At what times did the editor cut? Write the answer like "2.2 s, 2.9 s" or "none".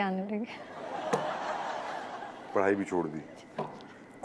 none